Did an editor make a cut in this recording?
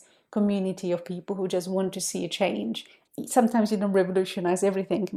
yes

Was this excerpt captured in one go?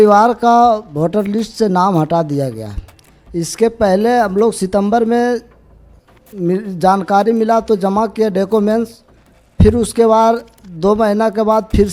yes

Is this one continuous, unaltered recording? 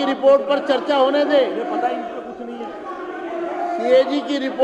yes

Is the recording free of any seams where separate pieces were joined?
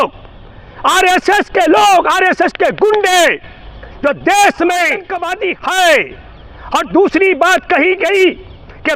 no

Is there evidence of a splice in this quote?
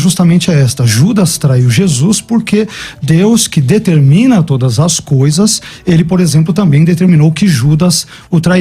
no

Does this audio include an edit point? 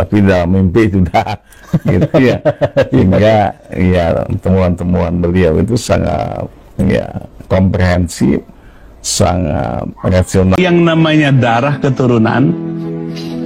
yes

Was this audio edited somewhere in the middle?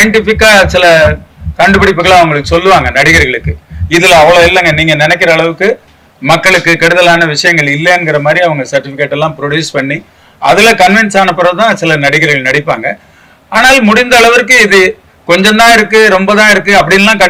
no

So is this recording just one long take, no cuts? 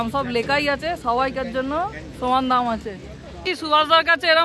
no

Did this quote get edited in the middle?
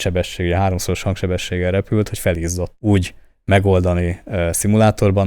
yes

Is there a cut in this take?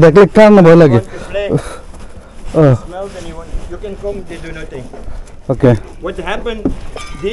no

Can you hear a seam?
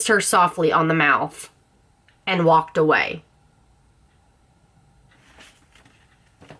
no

